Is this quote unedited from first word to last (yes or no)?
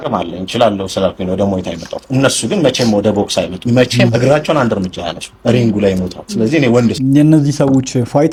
yes